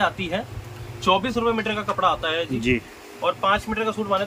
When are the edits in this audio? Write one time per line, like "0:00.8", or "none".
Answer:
none